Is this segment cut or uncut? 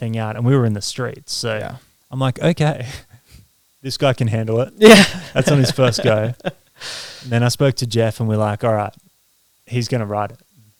uncut